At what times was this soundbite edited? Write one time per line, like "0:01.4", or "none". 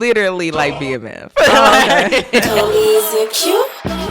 0:02.5